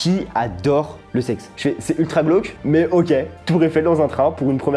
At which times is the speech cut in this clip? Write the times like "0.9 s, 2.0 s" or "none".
1.5 s